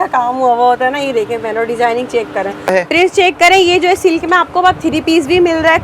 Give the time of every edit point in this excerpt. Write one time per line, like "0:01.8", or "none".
0:02.7

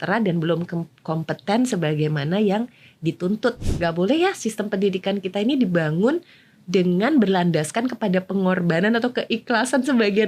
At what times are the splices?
0:03.7

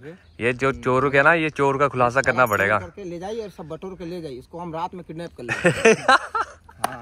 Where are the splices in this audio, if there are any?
none

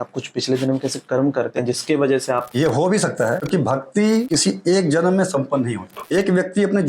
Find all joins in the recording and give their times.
0:02.5
0:03.4
0:04.3
0:06.0

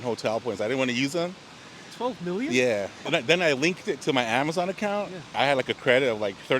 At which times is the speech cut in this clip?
0:03.0
0:05.3

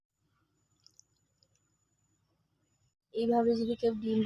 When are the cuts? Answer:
0:03.0

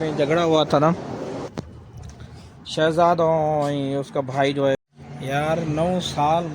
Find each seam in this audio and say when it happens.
0:04.8

